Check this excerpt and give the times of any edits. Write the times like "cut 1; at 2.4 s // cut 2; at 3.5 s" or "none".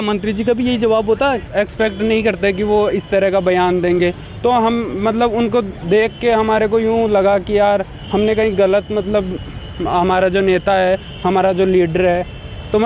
cut 1; at 1.4 s